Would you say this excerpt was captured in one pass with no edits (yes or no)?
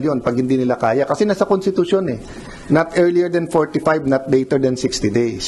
yes